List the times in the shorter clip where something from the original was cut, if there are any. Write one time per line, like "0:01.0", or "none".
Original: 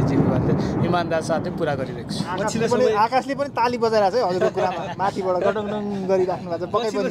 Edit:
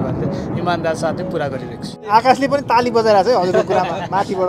0:02.1